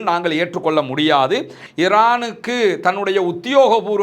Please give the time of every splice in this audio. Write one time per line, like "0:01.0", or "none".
0:01.6